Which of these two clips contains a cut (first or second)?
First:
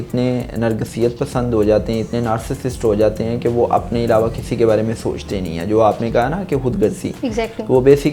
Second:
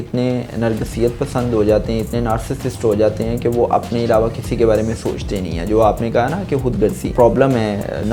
second